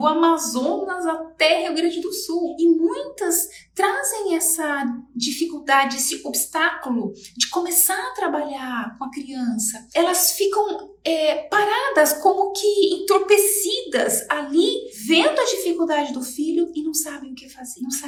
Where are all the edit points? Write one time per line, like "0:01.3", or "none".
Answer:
none